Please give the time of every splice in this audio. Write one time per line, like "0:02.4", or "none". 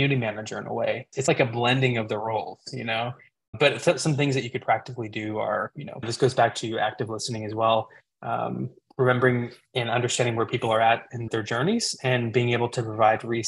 0:01.2
0:03.5
0:05.8
0:11.2